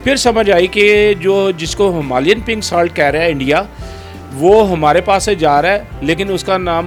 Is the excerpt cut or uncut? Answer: uncut